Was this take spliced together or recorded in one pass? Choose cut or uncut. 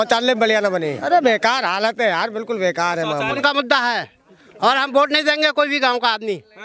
cut